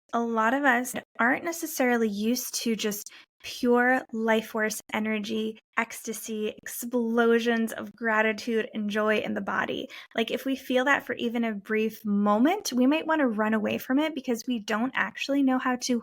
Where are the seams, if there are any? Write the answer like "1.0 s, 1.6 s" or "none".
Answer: 1.0 s, 5.6 s